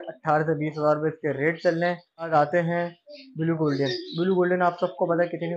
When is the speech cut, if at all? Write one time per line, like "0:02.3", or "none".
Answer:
0:02.3

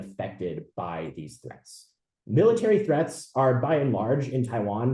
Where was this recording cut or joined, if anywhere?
none

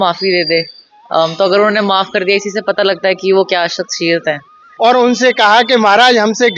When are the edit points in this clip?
0:04.6

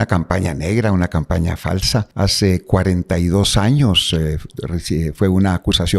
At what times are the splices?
0:02.1

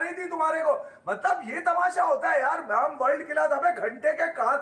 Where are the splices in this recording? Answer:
none

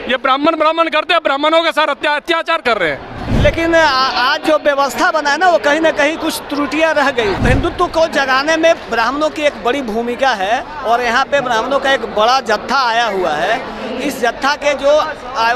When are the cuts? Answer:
0:03.2
0:07.4

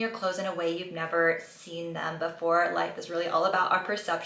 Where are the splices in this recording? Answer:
none

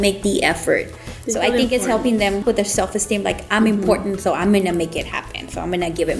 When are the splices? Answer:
0:02.4

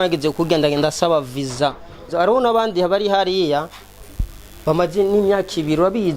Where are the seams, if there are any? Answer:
0:02.1

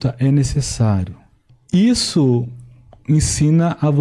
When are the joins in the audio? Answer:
0:01.5

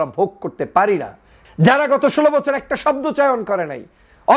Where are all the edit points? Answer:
0:01.3

